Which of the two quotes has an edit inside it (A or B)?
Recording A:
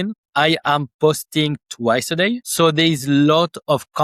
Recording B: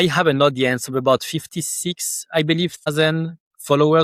A